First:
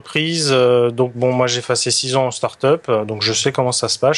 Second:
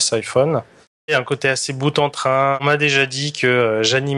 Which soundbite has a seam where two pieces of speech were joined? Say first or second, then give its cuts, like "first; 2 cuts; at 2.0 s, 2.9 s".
second; 2 cuts; at 1.1 s, 2.6 s